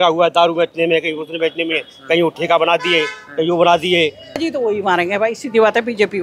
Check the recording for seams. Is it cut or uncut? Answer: cut